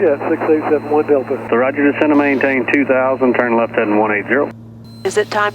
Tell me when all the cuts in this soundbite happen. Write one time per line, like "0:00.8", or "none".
0:01.5